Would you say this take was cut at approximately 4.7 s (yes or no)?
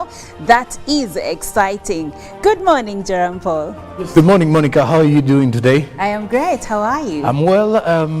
no